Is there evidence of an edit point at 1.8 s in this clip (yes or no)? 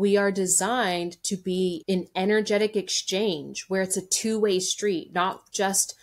yes